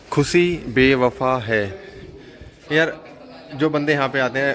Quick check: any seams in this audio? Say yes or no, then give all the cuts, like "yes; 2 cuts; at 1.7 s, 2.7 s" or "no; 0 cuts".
yes; 1 cut; at 2.6 s